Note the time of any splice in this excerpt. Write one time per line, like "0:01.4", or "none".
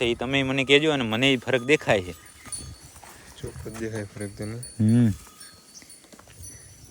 none